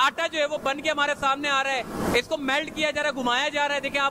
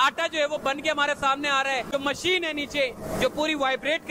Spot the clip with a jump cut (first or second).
second